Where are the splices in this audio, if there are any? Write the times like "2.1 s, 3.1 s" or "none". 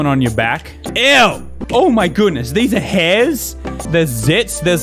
1.5 s